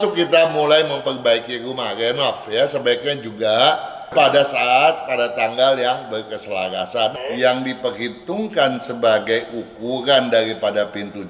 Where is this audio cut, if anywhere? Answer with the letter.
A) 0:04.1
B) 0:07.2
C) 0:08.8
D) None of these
B